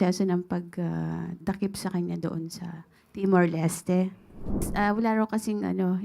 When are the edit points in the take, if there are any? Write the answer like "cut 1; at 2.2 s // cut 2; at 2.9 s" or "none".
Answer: cut 1; at 4.7 s